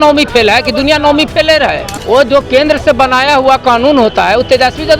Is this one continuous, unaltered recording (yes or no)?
no